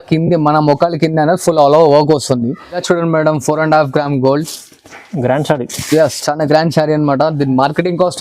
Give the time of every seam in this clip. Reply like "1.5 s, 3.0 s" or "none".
2.7 s